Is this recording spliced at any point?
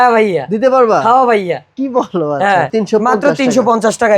yes; 1 cut; at 2.7 s

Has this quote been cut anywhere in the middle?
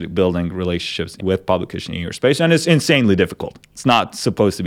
yes; 1 cut; at 1.1 s

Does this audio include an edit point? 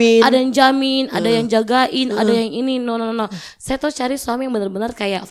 no; 0 cuts

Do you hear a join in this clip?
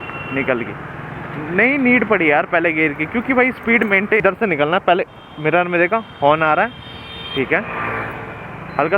yes; 1 cut; at 4.2 s

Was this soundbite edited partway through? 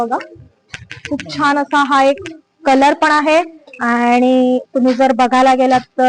no; 0 cuts

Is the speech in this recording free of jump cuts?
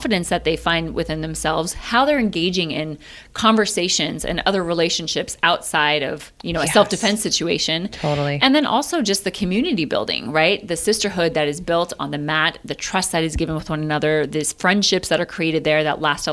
yes; 0 cuts

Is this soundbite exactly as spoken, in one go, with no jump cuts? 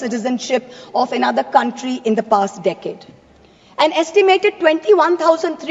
yes; 0 cuts

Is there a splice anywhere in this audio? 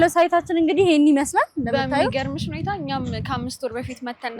no; 0 cuts

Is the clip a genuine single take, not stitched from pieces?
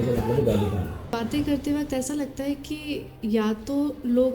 no; 1 cut; at 1.1 s

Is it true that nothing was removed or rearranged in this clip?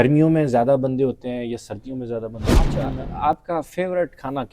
no; 1 cut; at 2.7 s

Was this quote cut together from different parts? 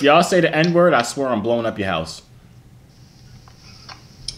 no; 0 cuts

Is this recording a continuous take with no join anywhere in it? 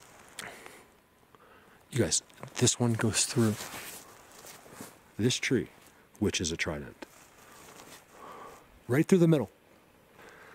yes; 0 cuts

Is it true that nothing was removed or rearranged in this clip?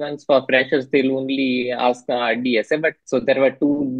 no; 1 cut; at 3.0 s

